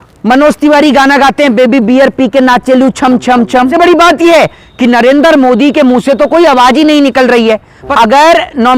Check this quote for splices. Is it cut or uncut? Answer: cut